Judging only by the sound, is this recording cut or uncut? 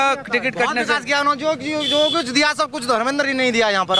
uncut